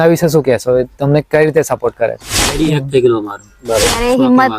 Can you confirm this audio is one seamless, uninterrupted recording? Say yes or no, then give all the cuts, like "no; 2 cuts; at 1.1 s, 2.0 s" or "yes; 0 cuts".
no; 1 cut; at 2.5 s